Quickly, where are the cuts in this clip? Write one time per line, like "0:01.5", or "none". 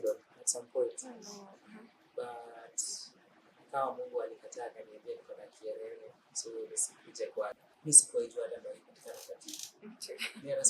0:07.6